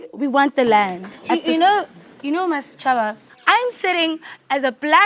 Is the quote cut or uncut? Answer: cut